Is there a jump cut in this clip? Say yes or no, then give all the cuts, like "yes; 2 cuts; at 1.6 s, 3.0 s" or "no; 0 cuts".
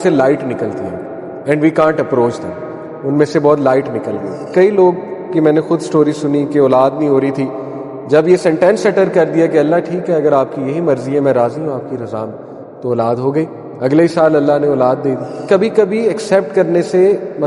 yes; 2 cuts; at 4.5 s, 15.4 s